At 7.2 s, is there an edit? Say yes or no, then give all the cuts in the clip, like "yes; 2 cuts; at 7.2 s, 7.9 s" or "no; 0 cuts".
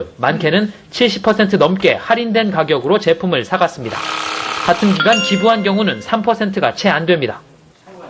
no; 1 cut; at 0.9 s